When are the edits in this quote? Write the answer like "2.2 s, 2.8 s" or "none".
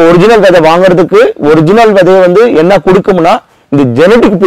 none